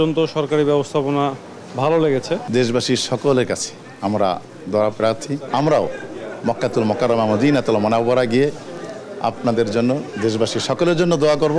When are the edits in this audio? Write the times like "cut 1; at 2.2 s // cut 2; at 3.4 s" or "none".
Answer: cut 1; at 2.4 s // cut 2; at 5.4 s